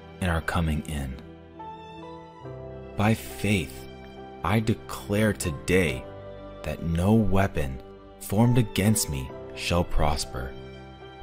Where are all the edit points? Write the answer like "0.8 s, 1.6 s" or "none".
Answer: 1.2 s, 3.0 s